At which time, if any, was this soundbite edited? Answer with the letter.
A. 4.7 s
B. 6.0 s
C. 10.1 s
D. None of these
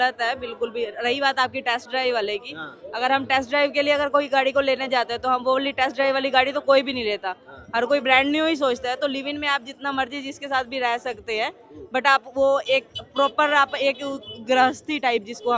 D